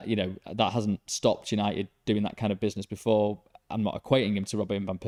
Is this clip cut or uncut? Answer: uncut